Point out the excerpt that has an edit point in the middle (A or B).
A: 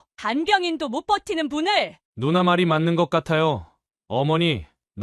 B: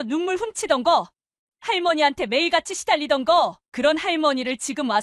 A